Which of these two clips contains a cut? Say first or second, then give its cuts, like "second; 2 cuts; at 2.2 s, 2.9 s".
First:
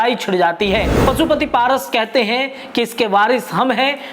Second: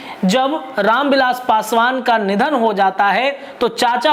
first; 1 cut; at 0.9 s